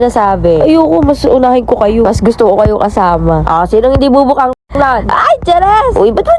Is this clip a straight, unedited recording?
yes; 0 cuts

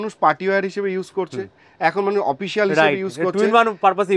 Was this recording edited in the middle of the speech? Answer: no; 0 cuts

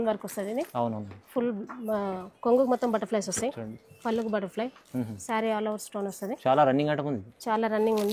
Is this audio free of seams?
yes; 0 cuts

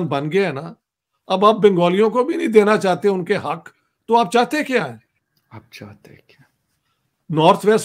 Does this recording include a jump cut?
no; 0 cuts

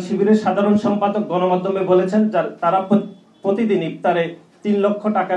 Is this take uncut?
yes; 0 cuts

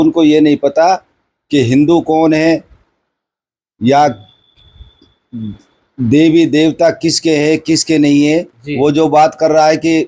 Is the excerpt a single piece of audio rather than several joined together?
yes; 0 cuts

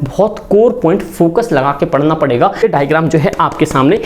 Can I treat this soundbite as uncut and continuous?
no; 1 cut; at 2.6 s

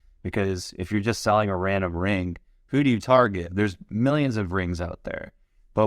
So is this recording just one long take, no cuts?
no; 1 cut; at 3.5 s

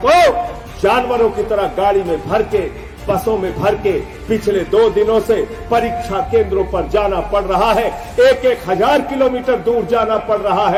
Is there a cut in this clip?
no; 0 cuts

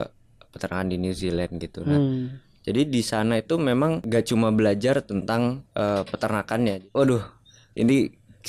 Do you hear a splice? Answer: yes; 3 cuts; at 4.0 s, 5.6 s, 6.8 s

